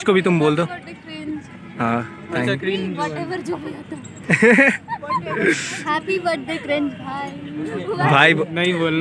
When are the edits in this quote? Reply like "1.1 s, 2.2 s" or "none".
none